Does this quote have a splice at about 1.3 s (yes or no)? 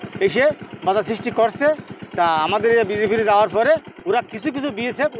no